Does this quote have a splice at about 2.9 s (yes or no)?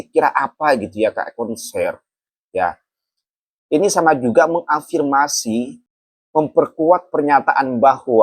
no